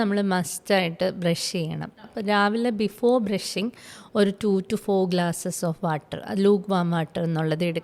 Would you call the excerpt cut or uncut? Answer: uncut